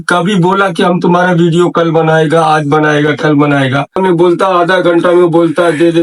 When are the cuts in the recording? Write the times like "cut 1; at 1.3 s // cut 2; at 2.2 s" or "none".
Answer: cut 1; at 3.9 s